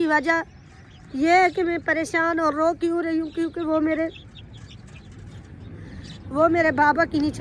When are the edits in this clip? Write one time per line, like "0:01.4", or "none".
none